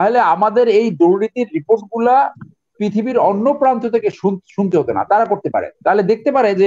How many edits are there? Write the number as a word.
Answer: zero